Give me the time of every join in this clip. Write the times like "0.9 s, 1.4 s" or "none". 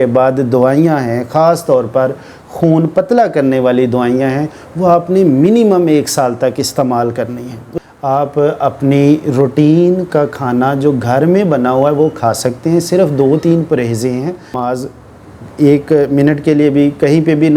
7.6 s, 14.6 s

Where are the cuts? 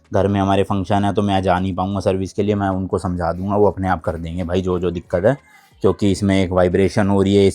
none

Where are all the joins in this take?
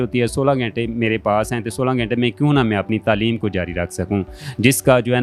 none

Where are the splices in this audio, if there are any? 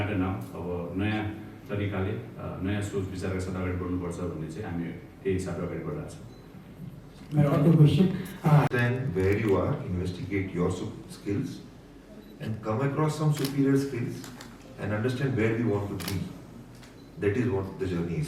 none

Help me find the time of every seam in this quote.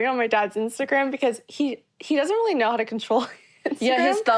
none

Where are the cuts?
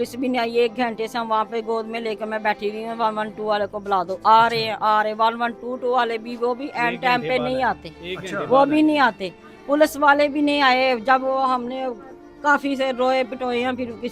none

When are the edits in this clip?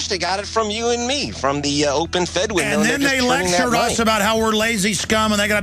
1.6 s

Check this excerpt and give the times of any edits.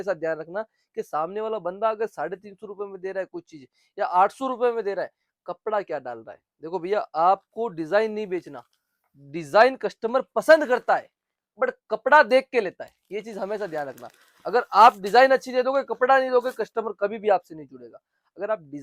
none

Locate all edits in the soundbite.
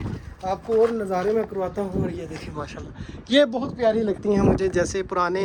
none

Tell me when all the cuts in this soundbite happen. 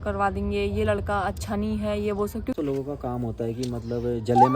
2.5 s

